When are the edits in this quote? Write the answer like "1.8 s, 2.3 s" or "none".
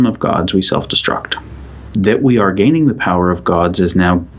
1.8 s